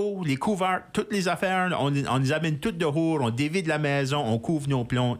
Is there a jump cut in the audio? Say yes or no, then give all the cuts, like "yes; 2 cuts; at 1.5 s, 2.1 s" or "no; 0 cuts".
no; 0 cuts